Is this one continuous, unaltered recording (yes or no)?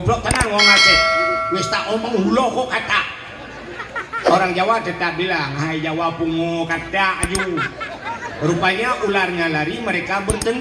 yes